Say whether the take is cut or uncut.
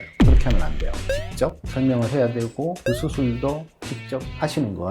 cut